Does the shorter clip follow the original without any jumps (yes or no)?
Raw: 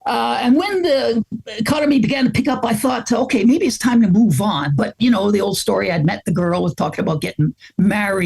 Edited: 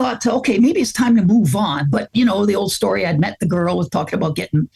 yes